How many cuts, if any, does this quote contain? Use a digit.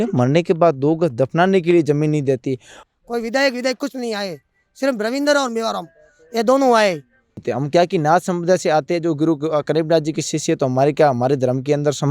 2